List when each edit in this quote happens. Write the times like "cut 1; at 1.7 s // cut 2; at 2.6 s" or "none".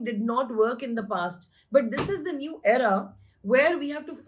none